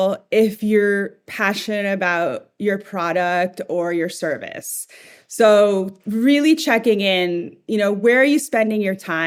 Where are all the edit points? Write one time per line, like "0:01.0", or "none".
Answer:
none

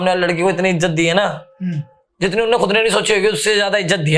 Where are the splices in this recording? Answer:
none

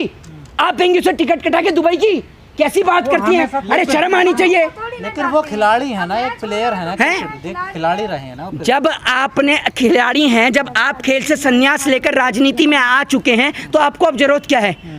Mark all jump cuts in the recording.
none

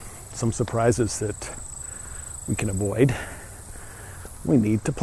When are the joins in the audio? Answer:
none

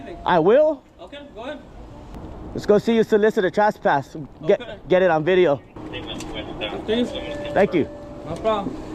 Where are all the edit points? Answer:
0:02.1
0:05.8

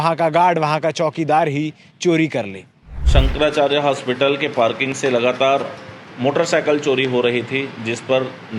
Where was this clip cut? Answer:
0:03.0

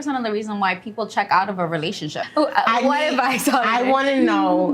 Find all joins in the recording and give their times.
0:02.2

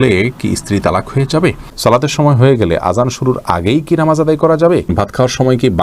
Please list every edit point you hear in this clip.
0:01.7
0:04.9

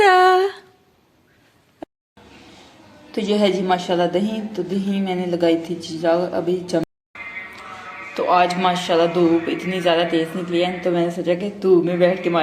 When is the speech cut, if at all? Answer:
0:01.8
0:06.8

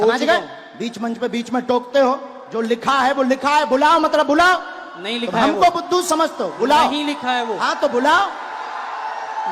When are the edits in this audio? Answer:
none

